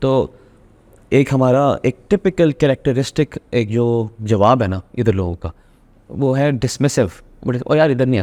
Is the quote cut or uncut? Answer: uncut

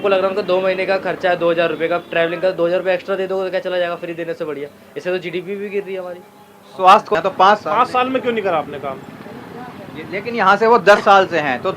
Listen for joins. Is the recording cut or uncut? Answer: cut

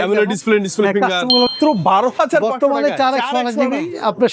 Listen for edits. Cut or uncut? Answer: cut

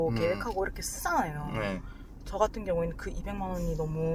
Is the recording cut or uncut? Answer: uncut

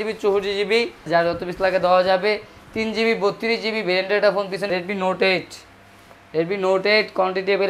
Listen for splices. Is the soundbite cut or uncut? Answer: cut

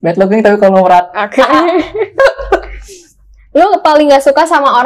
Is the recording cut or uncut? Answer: uncut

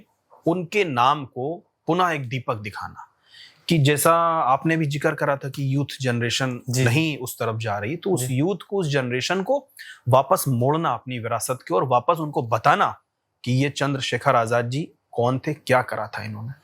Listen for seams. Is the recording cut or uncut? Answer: uncut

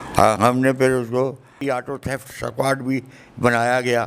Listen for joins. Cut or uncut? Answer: cut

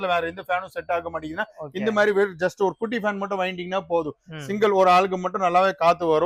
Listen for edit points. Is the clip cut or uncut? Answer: uncut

